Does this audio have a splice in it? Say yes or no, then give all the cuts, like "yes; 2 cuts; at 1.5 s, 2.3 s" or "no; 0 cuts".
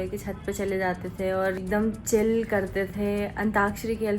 yes; 1 cut; at 1.6 s